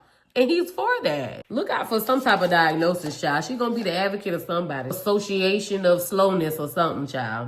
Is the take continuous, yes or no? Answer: no